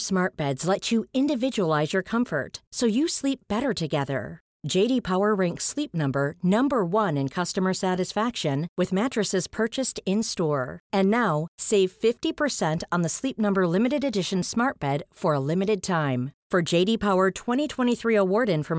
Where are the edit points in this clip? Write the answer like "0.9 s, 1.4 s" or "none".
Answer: none